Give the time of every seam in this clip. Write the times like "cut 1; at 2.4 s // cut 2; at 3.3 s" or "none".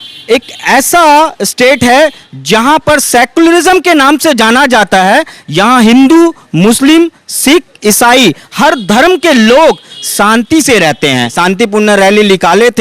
cut 1; at 11.3 s